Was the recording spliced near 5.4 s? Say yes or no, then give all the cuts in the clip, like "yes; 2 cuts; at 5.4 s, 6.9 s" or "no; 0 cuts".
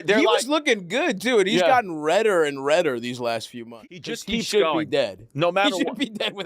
no; 1 cut; at 4.1 s